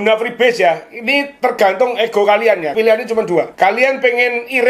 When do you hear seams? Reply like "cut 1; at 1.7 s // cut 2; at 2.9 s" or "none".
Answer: cut 1; at 3.5 s